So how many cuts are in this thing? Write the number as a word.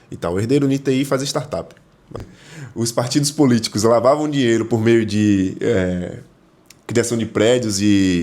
one